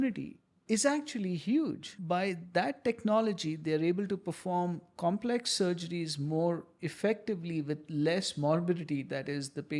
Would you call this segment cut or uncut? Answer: cut